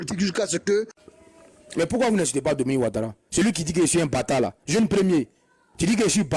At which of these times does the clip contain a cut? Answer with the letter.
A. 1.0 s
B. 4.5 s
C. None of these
A